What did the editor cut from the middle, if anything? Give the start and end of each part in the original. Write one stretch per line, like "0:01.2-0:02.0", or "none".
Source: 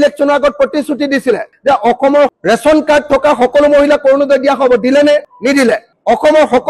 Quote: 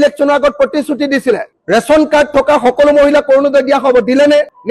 0:01.6-0:02.3